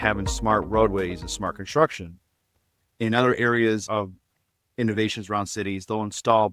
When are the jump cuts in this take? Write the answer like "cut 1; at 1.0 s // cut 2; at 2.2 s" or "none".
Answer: cut 1; at 3.8 s